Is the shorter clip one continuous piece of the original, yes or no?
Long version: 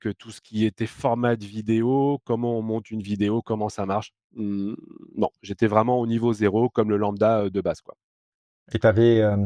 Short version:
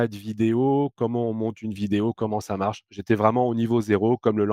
no